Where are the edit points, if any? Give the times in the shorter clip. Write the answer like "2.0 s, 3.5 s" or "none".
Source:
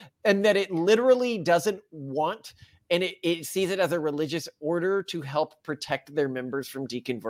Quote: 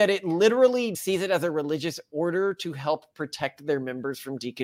0.9 s

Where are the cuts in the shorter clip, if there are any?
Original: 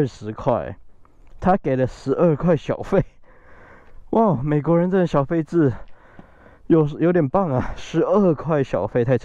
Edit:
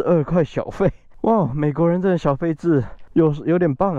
1.1 s, 3.0 s

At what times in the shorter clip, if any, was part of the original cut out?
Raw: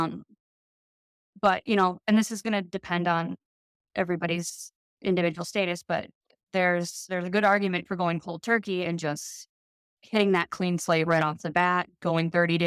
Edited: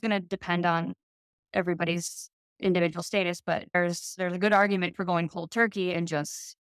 3.8 s

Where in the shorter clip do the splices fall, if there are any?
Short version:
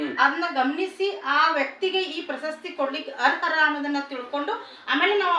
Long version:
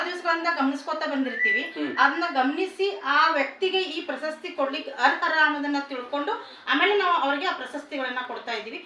none

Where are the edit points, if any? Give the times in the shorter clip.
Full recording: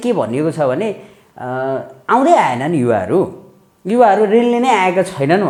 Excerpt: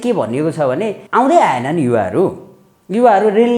1.0 s

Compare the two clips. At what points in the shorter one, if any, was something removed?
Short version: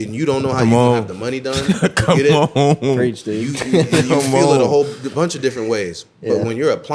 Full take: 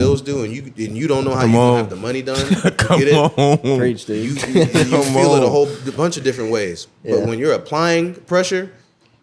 none

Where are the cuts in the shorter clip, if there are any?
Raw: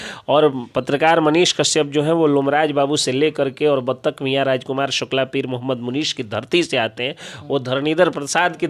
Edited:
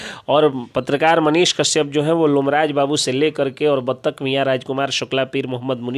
none

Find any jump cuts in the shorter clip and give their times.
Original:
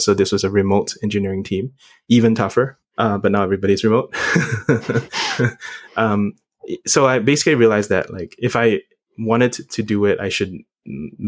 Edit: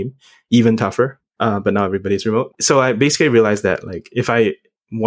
2.6 s

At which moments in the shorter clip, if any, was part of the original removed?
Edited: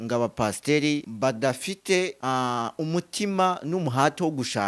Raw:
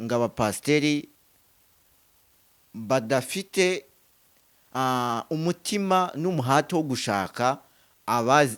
1.1 s, 2.2 s

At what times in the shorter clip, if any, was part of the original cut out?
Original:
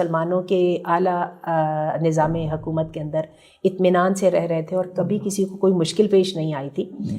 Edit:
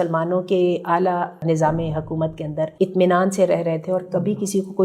1.4 s, 2.7 s

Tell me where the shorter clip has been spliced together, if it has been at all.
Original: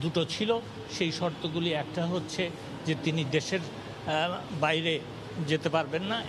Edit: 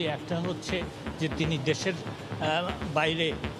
none

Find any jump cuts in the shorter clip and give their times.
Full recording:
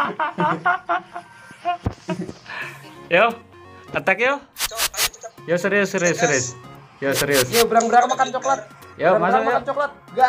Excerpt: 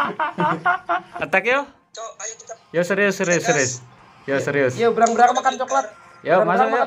1.1 s

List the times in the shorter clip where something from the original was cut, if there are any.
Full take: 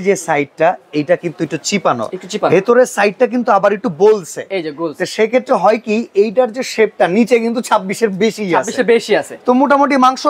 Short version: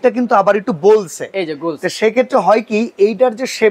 none

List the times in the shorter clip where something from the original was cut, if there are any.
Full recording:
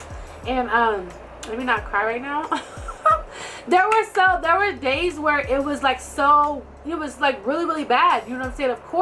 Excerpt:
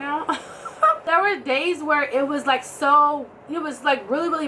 1.1 s

